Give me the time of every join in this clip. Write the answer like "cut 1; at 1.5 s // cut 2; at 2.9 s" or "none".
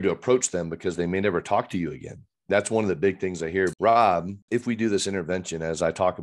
cut 1; at 3.7 s // cut 2; at 4.4 s